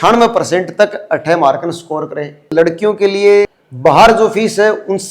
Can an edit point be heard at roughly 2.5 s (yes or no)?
yes